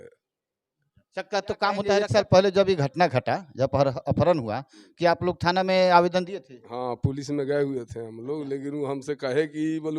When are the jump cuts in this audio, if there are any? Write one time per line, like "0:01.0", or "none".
0:01.9